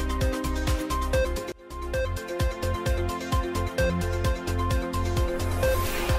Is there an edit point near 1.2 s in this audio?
yes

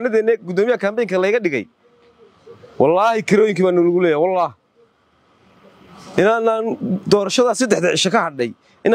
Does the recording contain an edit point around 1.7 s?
no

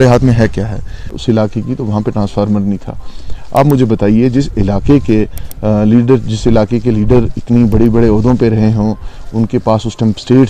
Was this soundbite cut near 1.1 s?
yes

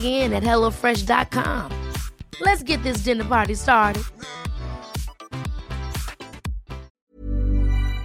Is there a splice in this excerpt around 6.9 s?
yes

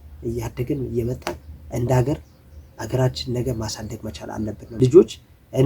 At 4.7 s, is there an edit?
yes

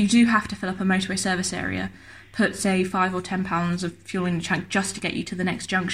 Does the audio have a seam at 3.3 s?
no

